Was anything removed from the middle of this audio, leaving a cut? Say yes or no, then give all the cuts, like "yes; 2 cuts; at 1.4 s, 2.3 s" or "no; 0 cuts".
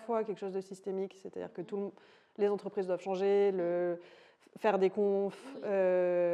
no; 0 cuts